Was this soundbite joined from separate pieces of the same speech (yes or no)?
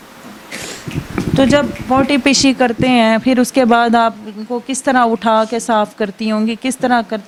no